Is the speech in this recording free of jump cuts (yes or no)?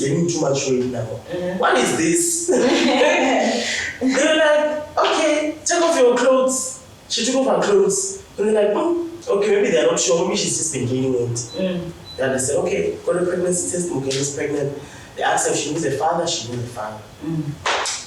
yes